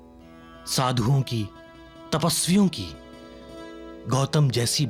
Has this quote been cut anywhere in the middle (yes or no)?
no